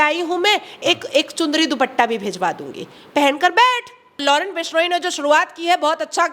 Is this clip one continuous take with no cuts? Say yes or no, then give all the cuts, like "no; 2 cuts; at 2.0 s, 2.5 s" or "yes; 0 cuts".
no; 1 cut; at 4.2 s